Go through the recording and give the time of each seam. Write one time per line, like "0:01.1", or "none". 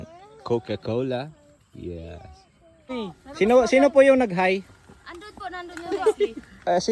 0:02.9